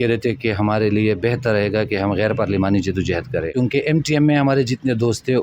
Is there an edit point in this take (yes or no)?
yes